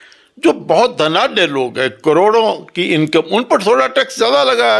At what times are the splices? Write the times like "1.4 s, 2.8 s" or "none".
none